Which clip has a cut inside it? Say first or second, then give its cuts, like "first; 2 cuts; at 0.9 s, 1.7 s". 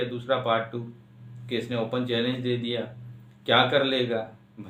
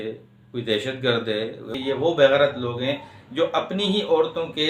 second; 1 cut; at 1.6 s